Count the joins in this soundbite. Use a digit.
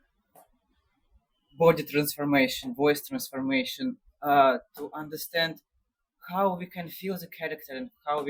0